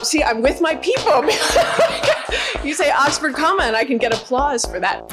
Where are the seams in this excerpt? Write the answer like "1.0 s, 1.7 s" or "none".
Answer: none